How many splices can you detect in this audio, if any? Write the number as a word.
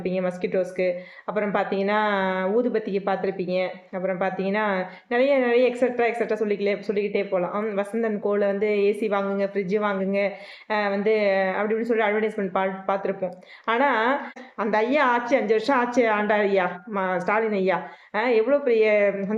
one